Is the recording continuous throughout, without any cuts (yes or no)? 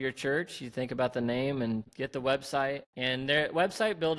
no